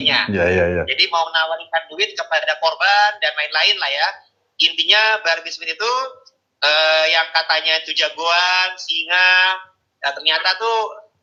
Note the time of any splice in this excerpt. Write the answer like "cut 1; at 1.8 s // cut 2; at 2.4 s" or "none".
none